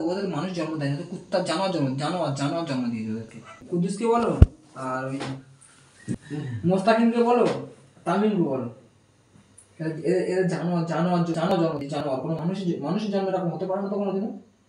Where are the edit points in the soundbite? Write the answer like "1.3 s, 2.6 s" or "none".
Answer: 3.5 s, 6.1 s